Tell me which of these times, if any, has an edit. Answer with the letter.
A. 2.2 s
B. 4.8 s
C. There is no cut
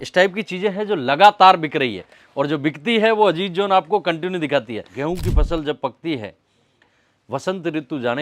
B